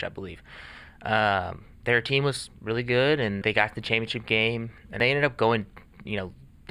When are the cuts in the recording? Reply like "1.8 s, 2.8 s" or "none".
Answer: 3.4 s, 5.0 s

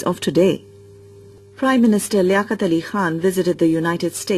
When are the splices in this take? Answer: 3.3 s

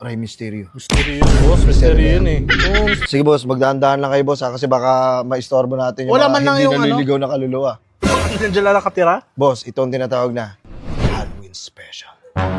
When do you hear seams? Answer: 3.0 s

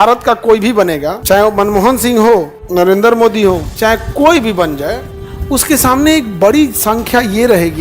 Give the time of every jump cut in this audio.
1.1 s, 2.6 s, 3.7 s

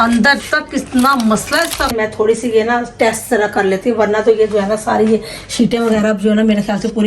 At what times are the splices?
1.9 s

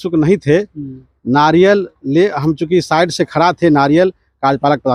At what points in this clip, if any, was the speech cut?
none

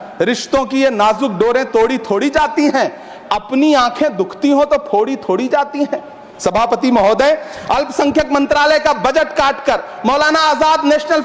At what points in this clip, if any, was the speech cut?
none

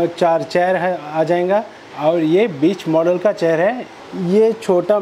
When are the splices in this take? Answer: 1.8 s, 3.9 s

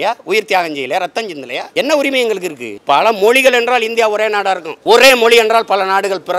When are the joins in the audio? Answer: 1.6 s, 2.7 s, 4.7 s

